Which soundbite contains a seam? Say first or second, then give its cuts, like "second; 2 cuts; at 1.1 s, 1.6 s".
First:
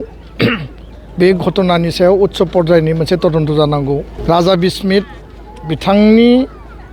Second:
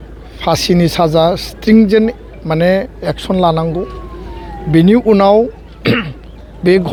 first; 1 cut; at 4.1 s